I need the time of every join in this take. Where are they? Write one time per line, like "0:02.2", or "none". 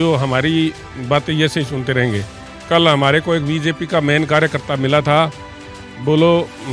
0:02.4